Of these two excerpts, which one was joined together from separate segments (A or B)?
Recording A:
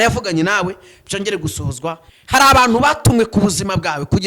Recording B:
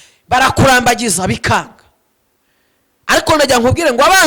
A